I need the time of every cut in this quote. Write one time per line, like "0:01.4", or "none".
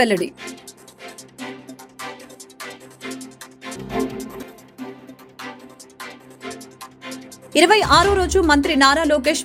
none